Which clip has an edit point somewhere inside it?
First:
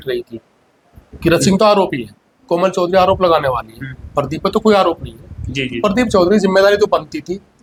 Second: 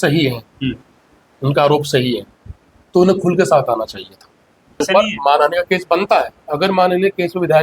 second; 1 cut; at 4.8 s

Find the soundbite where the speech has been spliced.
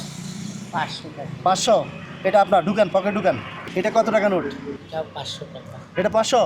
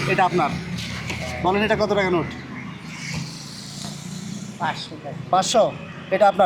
first; 2 cuts; at 3.6 s, 4.8 s

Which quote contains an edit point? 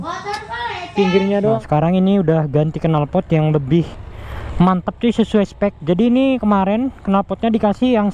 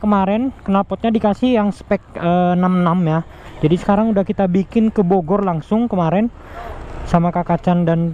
first; 1 cut; at 1.6 s

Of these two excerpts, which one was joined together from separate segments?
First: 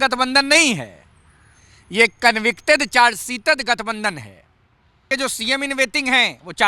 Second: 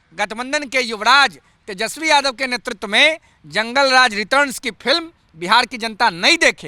first; 1 cut; at 5.0 s

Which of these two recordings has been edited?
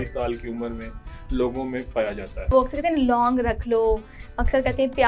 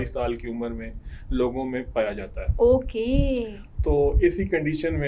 first; 1 cut; at 2.5 s

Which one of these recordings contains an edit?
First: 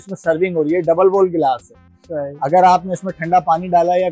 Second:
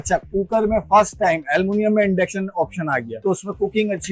second; 1 cut; at 3.1 s

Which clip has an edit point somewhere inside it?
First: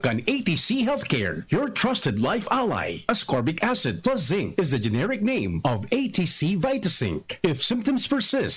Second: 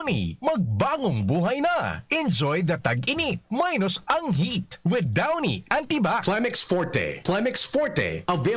second; 1 cut; at 6.2 s

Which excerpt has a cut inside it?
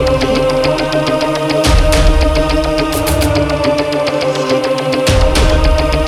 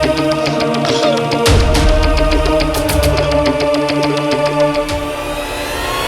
second; 1 cut; at 4.5 s

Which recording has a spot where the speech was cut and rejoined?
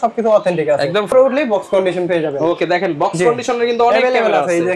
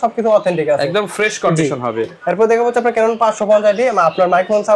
first; 1 cut; at 1.1 s

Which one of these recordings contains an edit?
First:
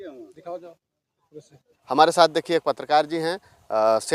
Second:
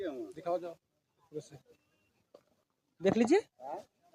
first; 1 cut; at 1.7 s

